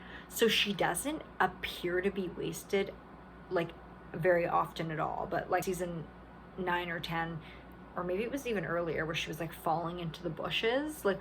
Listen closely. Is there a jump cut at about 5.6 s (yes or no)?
yes